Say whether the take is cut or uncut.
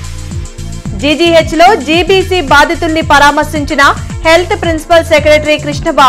uncut